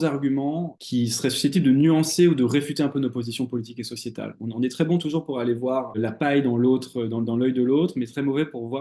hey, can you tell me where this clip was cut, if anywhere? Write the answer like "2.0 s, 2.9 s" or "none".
none

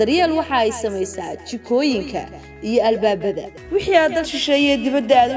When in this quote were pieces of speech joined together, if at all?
3.5 s

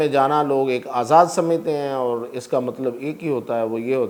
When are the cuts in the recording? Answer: none

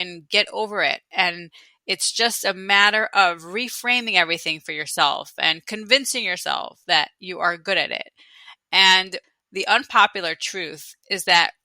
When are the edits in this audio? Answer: 9.2 s

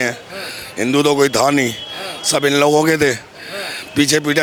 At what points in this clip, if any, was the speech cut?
none

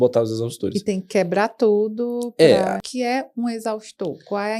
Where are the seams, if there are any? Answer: 2.9 s

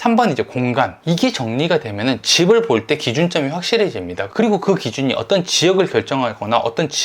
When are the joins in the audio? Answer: 0.9 s

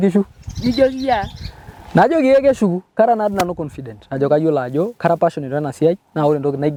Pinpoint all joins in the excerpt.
none

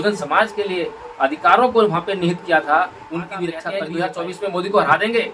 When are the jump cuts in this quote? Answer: 3.7 s

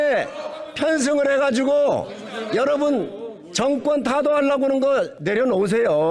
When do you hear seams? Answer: 5.2 s

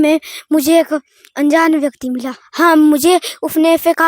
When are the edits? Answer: 2.6 s

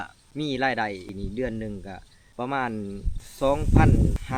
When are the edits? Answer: none

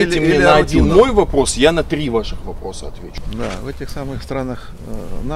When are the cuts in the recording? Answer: 3.0 s

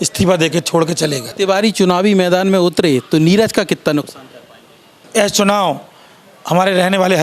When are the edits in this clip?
1.2 s, 5.0 s

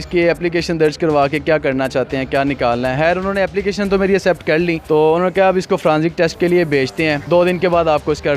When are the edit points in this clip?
none

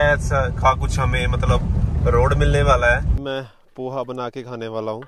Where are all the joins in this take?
3.1 s

